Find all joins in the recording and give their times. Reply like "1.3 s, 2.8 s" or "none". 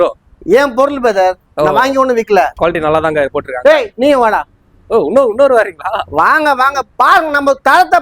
2.5 s